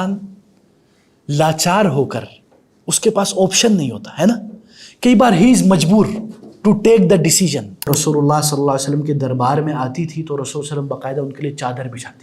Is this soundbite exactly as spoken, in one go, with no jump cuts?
no; 1 cut; at 7.9 s

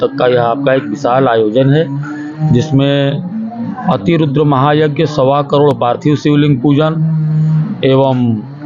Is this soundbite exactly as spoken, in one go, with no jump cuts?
yes; 0 cuts

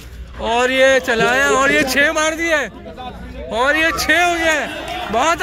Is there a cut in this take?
no; 0 cuts

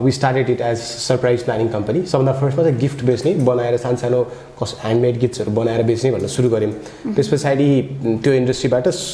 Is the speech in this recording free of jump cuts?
yes; 0 cuts

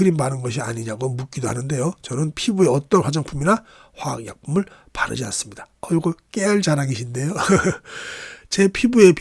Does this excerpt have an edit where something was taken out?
no; 0 cuts

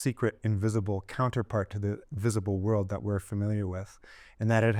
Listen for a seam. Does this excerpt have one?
no; 0 cuts

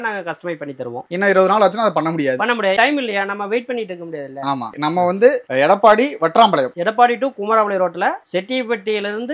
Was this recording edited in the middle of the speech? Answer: no; 0 cuts

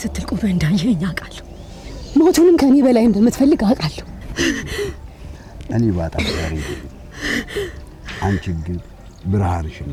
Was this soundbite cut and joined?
no; 0 cuts

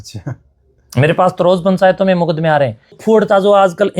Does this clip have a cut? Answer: yes; 1 cut; at 3.0 s

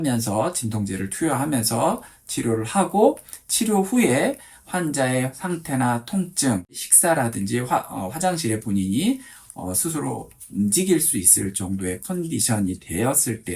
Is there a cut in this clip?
yes; 1 cut; at 6.9 s

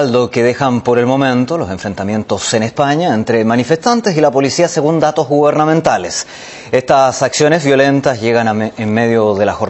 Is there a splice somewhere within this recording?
no; 0 cuts

